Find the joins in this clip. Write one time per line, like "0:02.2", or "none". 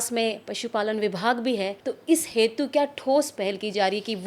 0:01.9
0:03.3